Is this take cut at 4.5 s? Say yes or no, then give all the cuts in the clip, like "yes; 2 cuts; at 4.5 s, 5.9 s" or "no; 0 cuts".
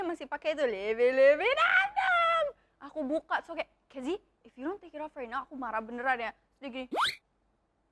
no; 0 cuts